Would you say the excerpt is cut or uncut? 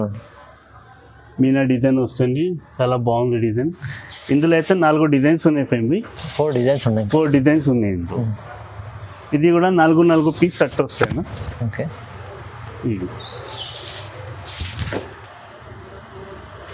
uncut